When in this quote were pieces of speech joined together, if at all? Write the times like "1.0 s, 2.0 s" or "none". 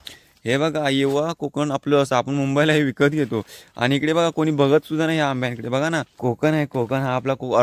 6.1 s